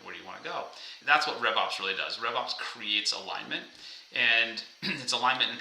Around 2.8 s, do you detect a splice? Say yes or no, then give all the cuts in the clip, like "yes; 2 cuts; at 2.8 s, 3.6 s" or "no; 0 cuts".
no; 1 cut; at 0.9 s